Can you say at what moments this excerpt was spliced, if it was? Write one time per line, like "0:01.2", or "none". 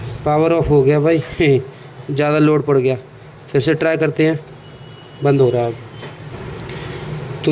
none

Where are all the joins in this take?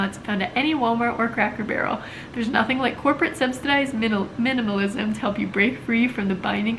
none

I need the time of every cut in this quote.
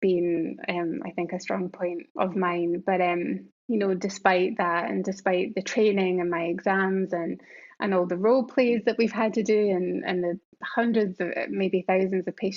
0:02.0
0:03.5

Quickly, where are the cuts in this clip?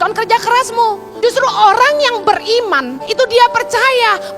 0:01.1
0:03.0

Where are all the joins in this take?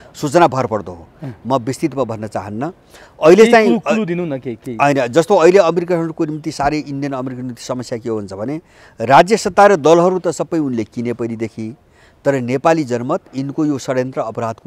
none

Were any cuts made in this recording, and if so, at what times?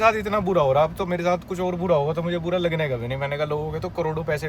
none

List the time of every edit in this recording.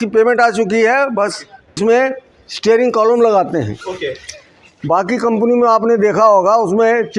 0:01.8

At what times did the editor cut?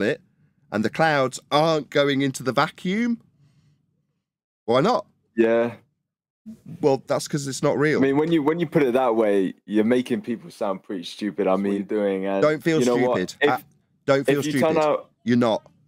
0:11.8

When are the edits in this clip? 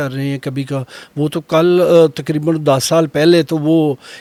none

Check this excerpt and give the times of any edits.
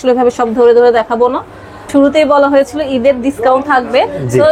0:01.7

